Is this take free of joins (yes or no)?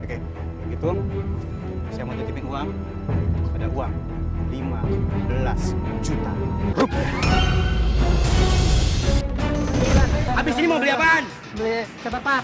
no